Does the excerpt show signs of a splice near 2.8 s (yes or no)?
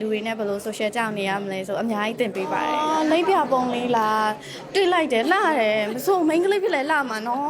yes